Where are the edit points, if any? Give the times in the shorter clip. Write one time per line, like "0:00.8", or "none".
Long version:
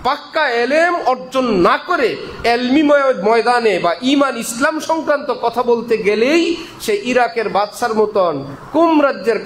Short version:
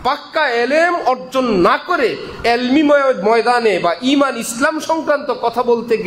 none